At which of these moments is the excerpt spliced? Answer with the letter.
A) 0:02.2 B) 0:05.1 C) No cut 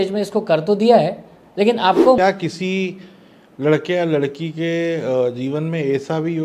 A